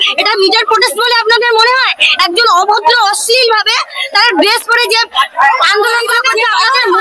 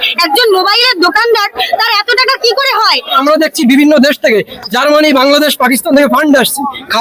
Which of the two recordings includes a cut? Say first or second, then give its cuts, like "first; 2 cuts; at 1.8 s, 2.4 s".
second; 1 cut; at 3.2 s